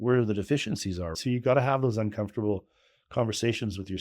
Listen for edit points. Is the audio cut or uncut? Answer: cut